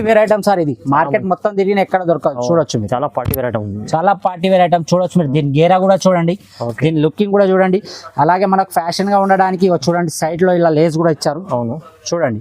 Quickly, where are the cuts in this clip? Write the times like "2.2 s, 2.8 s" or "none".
none